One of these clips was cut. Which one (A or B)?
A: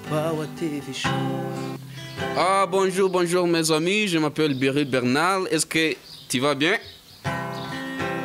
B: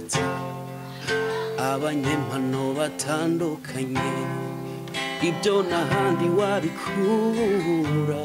A